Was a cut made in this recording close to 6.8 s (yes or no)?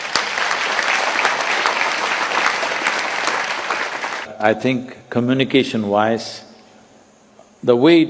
no